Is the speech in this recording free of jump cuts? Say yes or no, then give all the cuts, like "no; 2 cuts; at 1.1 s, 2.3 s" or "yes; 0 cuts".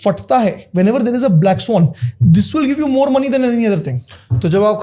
yes; 0 cuts